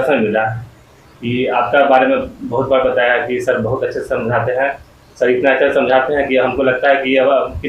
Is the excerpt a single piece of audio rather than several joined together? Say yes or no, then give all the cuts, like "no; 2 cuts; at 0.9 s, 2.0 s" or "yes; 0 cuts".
yes; 0 cuts